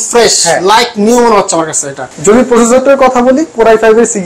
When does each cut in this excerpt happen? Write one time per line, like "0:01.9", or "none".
none